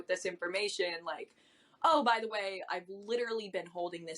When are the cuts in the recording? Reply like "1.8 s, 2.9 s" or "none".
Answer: none